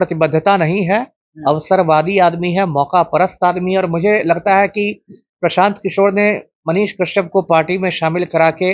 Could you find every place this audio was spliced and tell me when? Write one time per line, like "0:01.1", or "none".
none